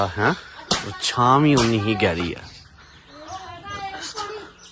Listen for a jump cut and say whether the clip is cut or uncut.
uncut